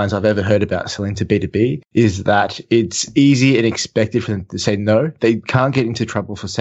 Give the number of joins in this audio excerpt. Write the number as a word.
zero